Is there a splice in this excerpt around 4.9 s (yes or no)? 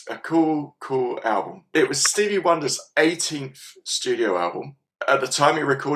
yes